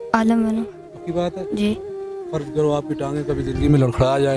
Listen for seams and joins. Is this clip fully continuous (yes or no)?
yes